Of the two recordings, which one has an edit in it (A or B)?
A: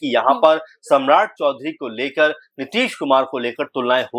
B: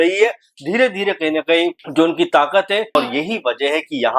B